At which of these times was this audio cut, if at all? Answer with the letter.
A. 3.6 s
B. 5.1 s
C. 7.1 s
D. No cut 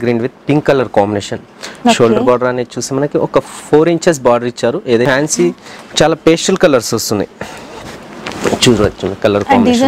B